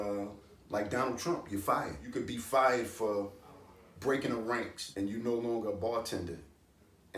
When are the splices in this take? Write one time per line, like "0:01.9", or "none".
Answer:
0:02.0
0:04.8

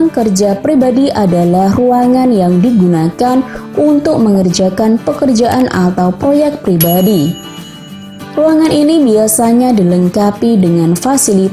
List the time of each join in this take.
none

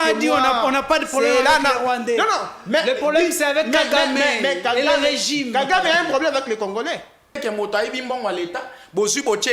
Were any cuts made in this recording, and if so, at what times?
0:07.4

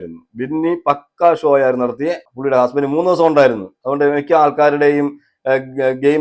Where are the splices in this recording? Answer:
0:02.3

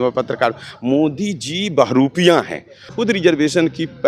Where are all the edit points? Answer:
0:02.9

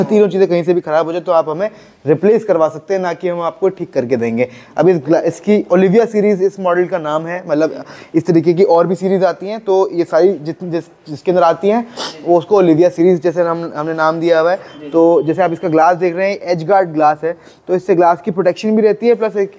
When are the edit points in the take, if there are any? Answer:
none

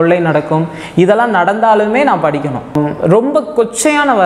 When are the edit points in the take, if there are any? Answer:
0:03.0

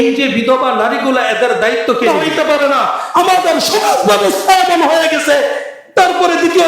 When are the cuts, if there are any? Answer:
0:02.1

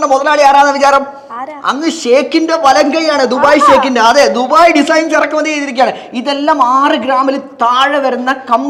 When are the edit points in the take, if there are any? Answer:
none

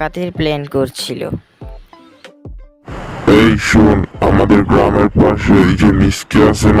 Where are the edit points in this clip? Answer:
0:02.6

